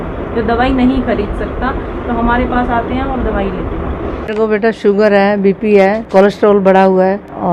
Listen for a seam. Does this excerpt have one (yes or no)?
no